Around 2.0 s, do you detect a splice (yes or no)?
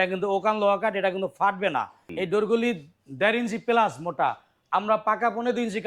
yes